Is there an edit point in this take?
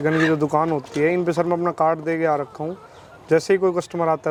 no; 0 cuts

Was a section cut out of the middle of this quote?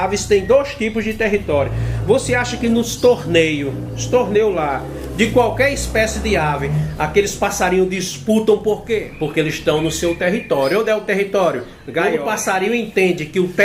yes; 2 cuts; at 9.0 s, 12.1 s

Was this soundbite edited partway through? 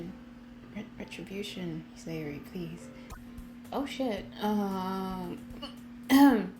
yes; 1 cut; at 3.1 s

